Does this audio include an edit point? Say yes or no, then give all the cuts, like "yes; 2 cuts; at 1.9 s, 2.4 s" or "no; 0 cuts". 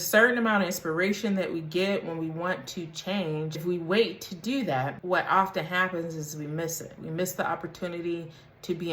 yes; 2 cuts; at 3.6 s, 5.0 s